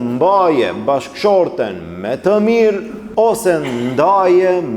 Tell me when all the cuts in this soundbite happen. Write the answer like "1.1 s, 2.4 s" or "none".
3.0 s